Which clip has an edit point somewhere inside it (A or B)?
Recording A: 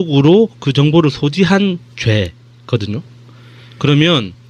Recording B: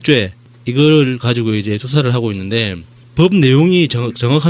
B